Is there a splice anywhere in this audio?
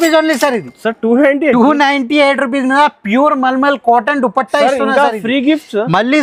no; 0 cuts

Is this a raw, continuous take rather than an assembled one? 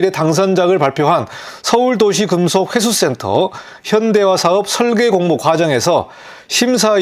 yes; 0 cuts

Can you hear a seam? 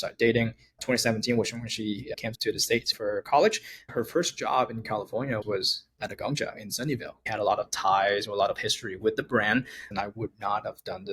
yes; 5 cuts; at 2.6 s, 3.9 s, 5.4 s, 7.3 s, 9.9 s

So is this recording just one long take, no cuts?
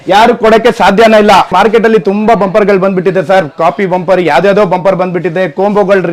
no; 1 cut; at 1.5 s

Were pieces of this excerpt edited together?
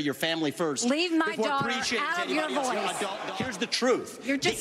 yes; 1 cut; at 3.3 s

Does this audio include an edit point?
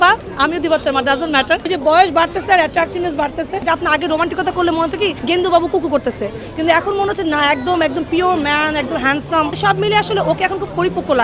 yes; 4 cuts; at 1.6 s, 3.6 s, 5.2 s, 9.5 s

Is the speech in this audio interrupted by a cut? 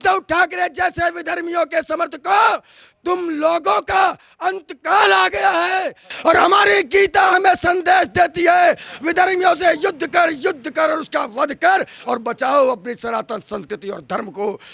yes; 1 cut; at 6.1 s

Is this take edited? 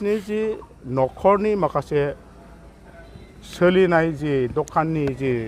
no; 0 cuts

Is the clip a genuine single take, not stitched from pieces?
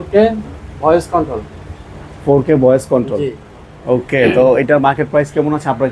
yes; 0 cuts

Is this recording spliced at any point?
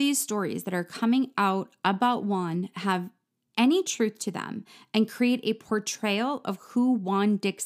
no; 0 cuts

